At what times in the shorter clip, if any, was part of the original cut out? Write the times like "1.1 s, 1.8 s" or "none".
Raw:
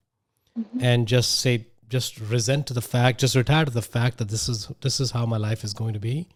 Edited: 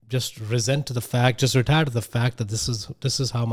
none